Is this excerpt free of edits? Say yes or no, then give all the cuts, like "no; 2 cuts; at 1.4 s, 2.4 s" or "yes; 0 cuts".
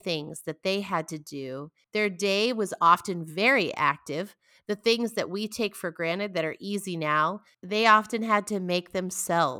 no; 1 cut; at 1.7 s